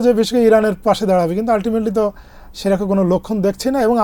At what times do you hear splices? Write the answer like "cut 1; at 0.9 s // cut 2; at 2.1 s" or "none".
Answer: none